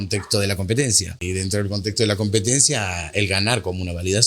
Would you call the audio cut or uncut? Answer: cut